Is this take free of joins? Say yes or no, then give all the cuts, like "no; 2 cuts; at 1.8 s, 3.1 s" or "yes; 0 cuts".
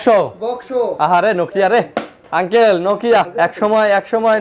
no; 1 cut; at 3.3 s